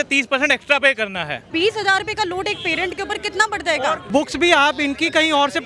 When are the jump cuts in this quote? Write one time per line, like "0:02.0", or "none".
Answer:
0:01.5
0:04.1